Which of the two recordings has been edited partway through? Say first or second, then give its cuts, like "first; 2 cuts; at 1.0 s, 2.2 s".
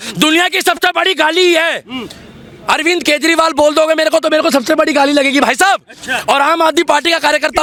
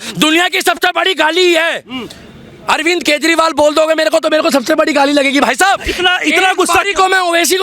second; 1 cut; at 5.9 s